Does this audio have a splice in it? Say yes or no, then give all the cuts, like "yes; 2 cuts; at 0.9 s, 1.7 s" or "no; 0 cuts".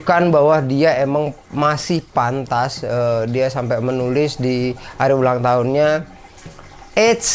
no; 0 cuts